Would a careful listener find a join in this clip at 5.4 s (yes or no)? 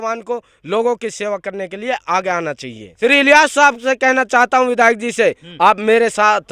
no